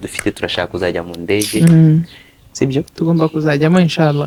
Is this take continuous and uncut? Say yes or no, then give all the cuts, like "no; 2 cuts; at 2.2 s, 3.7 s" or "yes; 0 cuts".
yes; 0 cuts